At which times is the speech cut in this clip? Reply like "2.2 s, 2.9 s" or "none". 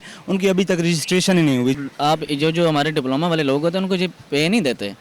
1.8 s